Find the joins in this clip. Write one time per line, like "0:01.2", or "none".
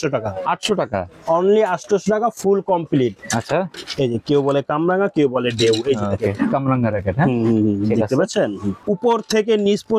0:03.7
0:08.8